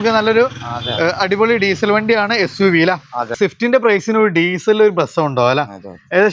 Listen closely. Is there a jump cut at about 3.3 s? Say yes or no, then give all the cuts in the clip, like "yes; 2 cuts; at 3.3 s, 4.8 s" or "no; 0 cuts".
yes; 1 cut; at 3.3 s